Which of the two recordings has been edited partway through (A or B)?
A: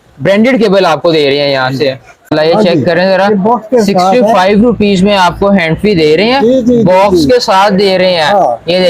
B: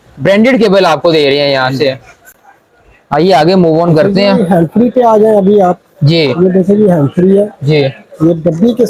A